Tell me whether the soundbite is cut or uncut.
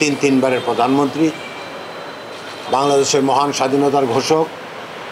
uncut